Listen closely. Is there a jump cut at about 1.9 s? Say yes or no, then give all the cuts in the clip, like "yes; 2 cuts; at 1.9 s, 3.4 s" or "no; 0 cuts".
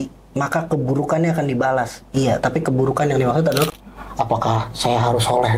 no; 1 cut; at 3.7 s